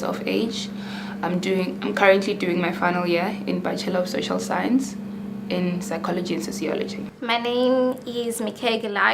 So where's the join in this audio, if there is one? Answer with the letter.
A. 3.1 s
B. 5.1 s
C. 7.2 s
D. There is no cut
B